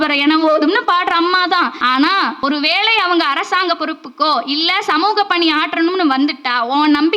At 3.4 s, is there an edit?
no; 1 cut; at 2.1 s

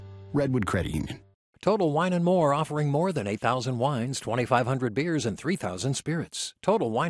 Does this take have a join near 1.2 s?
yes; 1 cut; at 1.2 s

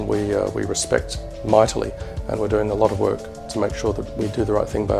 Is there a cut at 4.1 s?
yes; 1 cut; at 4.1 s

